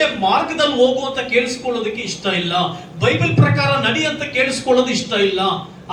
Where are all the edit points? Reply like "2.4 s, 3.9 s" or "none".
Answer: none